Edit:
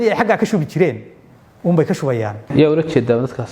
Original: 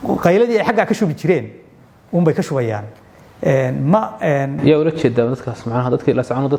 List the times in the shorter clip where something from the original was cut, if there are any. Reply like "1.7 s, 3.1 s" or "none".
2.4 s

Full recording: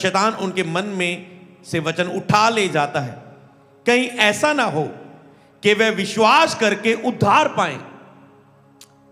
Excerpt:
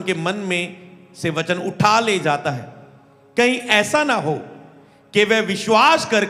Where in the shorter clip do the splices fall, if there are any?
none

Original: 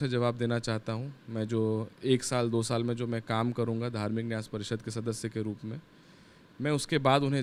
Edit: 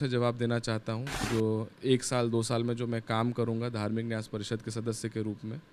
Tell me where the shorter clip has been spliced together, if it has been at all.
1.2 s

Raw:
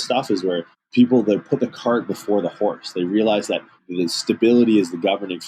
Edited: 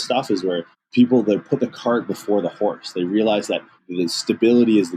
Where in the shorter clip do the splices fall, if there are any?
none

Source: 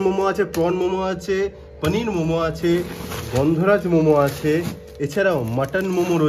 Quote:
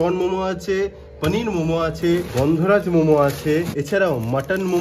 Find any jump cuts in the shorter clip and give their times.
2.3 s, 3.8 s

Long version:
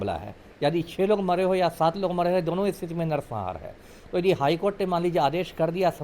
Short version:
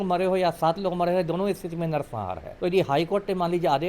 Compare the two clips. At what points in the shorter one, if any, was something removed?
2.5 s

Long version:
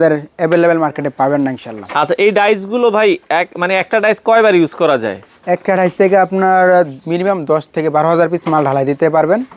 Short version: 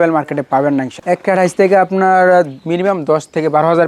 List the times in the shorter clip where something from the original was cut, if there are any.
0.9 s

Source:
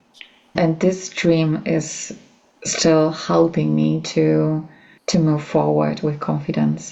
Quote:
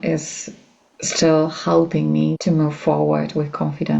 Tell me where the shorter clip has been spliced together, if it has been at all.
2.4 s

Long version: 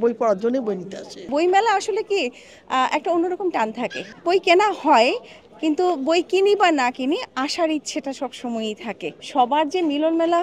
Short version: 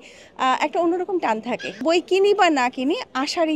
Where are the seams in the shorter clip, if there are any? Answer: 1.8 s

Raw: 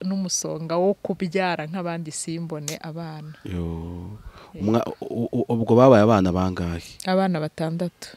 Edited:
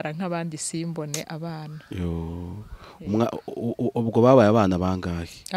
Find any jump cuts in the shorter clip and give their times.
none

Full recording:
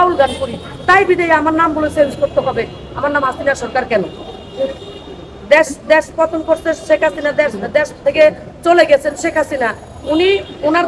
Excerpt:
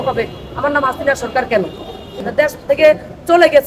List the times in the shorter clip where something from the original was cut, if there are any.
2.2 s

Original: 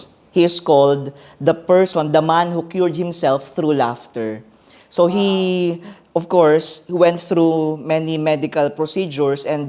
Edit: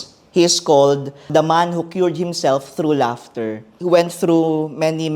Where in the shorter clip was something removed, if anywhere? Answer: 1.3 s, 3.7 s

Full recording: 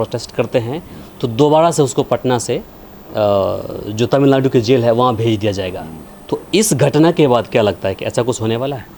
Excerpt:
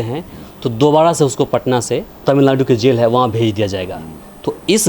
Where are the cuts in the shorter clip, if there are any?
2.2 s

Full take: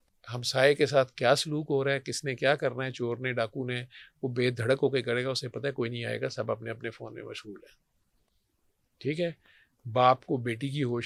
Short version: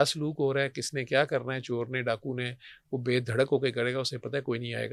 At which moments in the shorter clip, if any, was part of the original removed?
none

